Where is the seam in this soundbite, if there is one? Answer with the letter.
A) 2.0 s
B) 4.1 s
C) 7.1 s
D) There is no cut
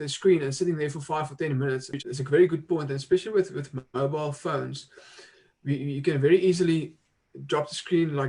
A